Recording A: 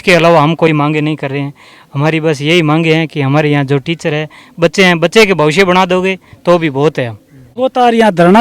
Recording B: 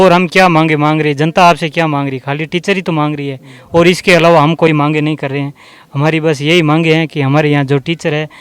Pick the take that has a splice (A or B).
A